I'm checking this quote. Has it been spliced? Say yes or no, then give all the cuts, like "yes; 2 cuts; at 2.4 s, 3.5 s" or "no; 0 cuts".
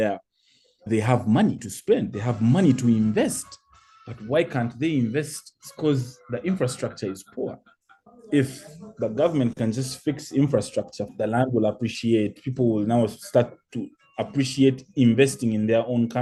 no; 0 cuts